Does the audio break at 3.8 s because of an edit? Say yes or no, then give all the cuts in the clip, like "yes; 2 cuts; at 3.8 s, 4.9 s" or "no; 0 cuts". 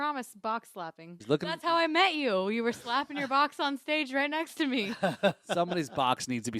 no; 1 cut; at 1.1 s